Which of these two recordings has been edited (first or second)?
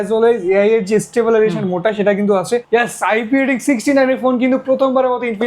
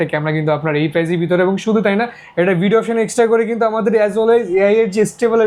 first